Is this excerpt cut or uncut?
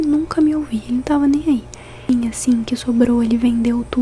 cut